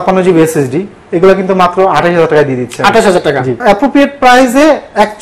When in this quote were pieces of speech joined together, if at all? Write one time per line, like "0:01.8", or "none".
0:03.6